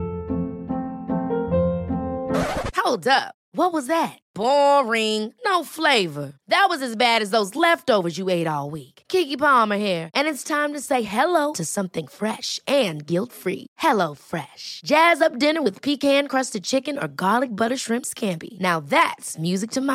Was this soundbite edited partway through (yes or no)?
no